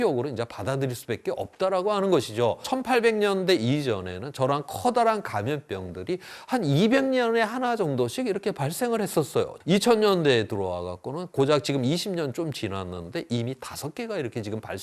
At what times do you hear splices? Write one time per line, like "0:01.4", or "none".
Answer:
0:02.7
0:09.6